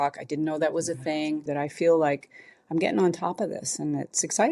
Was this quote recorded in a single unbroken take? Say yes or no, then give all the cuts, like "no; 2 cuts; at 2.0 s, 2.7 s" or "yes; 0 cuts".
no; 1 cut; at 1.5 s